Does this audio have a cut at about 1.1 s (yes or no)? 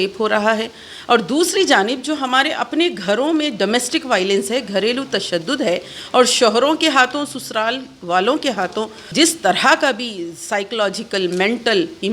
no